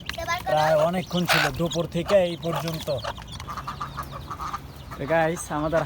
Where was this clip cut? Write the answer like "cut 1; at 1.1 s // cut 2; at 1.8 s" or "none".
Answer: cut 1; at 3.4 s